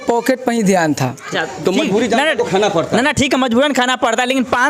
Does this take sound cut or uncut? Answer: cut